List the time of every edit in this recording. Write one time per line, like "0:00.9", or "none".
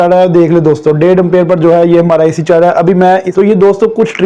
0:03.3